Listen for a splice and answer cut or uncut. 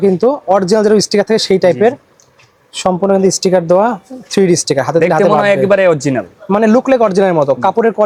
uncut